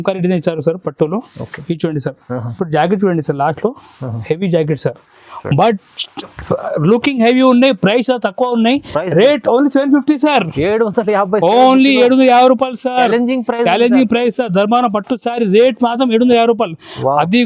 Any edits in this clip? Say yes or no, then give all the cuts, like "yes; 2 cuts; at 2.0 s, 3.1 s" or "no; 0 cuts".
no; 0 cuts